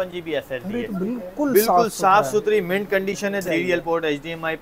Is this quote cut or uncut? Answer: cut